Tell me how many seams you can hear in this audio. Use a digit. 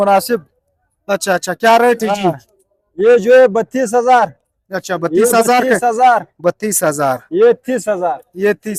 0